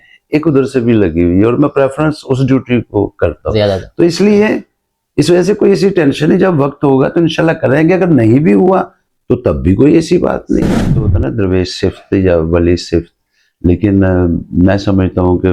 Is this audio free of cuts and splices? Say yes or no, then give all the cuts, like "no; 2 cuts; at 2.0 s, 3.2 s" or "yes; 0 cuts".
no; 1 cut; at 11.0 s